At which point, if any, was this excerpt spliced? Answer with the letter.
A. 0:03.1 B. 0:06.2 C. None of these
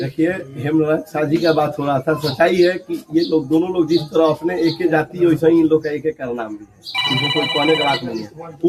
C